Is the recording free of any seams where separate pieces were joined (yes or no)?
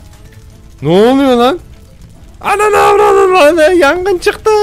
yes